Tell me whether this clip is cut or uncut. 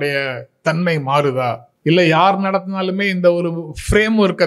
cut